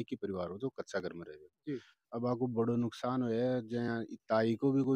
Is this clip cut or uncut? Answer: uncut